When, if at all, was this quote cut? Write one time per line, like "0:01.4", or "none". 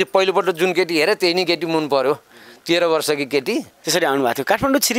0:03.7